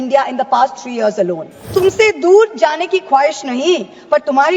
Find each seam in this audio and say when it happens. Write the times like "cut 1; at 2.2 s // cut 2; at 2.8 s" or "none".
cut 1; at 1.7 s